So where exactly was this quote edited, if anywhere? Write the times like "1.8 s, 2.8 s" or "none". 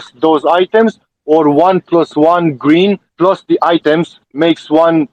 none

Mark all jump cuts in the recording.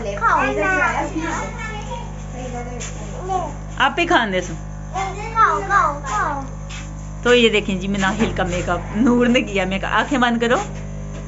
none

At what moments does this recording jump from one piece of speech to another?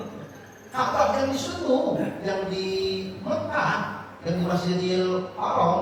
none

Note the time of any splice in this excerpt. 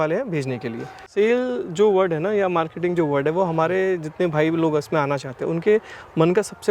1.0 s

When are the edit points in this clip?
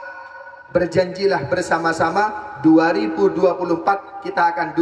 none

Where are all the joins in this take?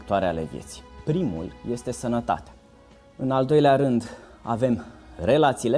2.6 s

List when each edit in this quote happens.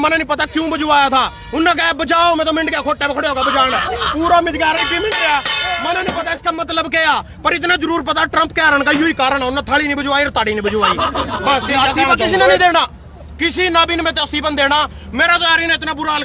12.6 s

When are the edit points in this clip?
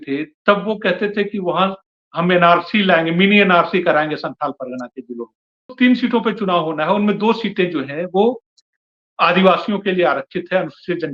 5.7 s

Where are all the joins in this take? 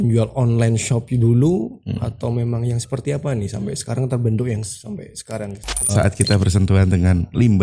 5.9 s

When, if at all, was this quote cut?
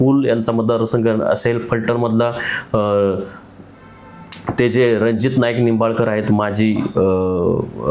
none

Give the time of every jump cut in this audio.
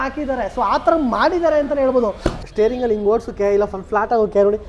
2.4 s

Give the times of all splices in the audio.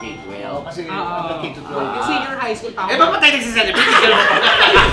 none

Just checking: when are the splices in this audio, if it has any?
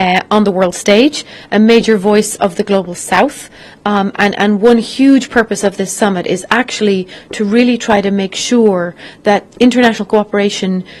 none

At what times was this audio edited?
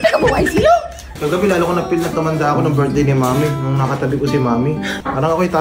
1.0 s

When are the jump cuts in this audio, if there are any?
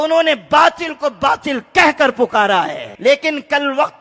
2.8 s

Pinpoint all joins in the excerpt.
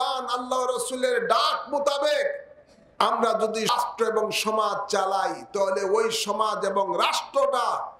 3.7 s

